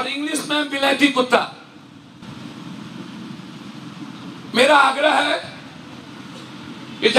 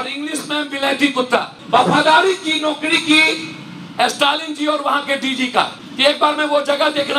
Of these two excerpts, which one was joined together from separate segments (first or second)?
second